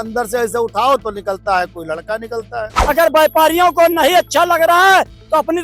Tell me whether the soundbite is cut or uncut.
cut